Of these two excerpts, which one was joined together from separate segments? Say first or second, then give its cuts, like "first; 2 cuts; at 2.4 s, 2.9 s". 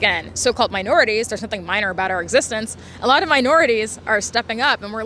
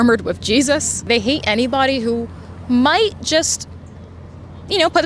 second; 1 cut; at 1.0 s